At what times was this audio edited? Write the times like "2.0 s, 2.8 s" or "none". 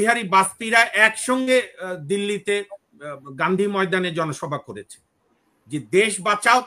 none